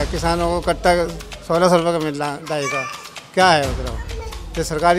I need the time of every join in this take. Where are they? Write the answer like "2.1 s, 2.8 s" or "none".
none